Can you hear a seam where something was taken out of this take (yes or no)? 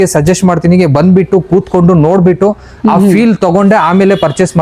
no